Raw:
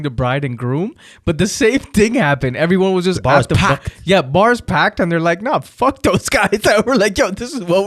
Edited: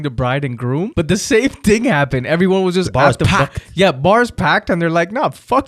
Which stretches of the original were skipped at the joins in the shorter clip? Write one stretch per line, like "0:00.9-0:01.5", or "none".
0:00.9-0:01.2